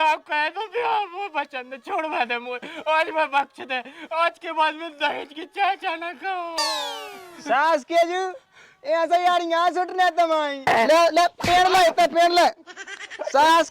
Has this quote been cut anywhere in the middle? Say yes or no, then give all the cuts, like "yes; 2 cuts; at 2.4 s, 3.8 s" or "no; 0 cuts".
yes; 1 cut; at 10.7 s